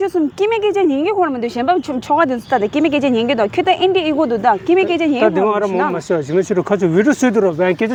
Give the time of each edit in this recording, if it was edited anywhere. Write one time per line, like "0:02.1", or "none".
none

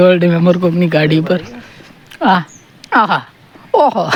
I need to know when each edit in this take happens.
none

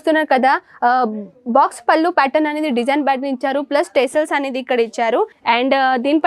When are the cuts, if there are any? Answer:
0:05.4

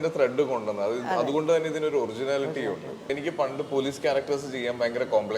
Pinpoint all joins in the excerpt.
0:03.1

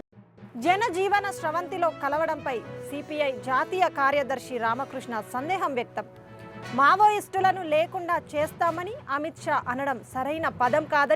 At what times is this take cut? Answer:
none

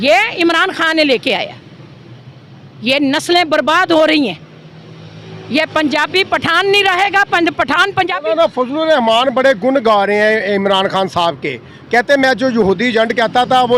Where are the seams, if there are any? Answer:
0:08.1

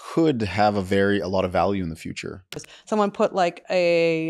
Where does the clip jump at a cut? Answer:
0:02.6

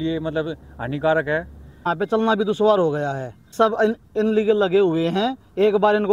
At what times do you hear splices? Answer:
0:01.9
0:03.5

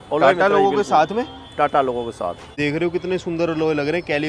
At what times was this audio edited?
0:02.5

